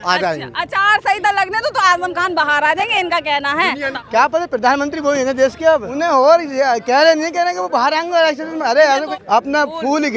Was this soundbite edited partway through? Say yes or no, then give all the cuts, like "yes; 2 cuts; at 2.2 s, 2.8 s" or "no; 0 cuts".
yes; 2 cuts; at 3.9 s, 9.1 s